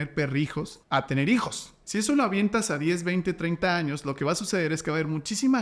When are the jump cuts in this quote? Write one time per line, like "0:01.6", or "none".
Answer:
0:01.7